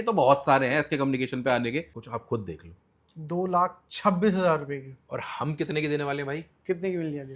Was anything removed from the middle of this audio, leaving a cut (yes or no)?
yes